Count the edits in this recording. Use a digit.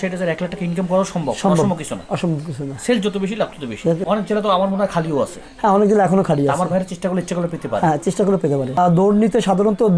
2